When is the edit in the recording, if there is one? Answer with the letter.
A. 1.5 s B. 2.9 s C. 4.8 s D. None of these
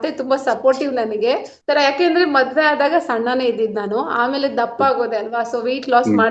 A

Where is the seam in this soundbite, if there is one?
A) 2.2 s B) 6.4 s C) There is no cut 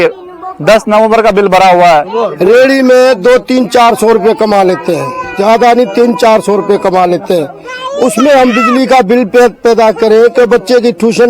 A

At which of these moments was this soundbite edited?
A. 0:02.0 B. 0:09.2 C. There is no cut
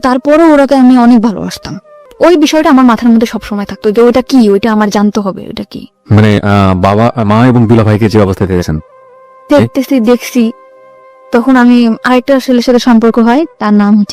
A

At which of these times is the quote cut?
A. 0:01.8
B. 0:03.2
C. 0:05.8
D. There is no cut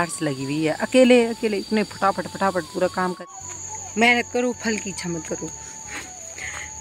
B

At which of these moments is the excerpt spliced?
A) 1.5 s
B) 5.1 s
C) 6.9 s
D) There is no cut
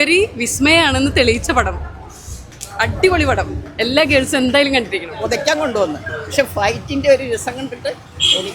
B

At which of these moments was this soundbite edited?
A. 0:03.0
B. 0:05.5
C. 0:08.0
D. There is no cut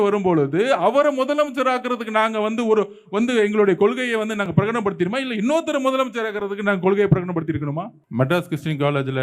C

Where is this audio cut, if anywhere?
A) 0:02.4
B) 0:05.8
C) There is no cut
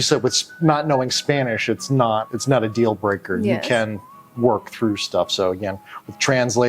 A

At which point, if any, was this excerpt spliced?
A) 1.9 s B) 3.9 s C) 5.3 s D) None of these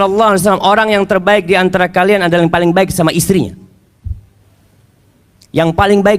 D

